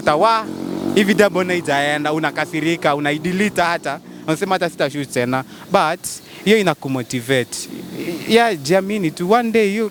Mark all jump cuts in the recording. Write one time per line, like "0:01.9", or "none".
none